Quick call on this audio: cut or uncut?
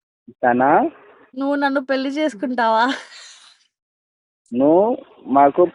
uncut